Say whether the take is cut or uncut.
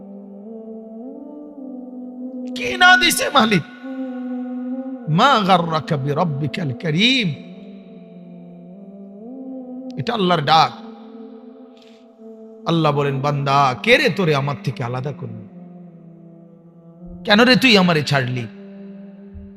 uncut